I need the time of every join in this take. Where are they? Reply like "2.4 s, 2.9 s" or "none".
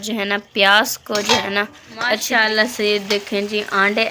2.2 s